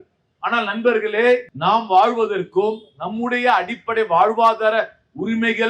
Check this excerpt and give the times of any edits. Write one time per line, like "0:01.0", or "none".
0:01.5